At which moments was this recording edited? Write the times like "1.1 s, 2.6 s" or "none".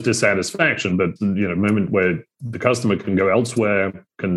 1.1 s